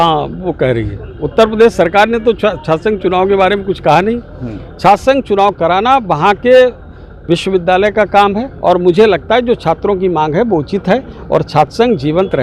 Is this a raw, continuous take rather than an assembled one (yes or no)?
yes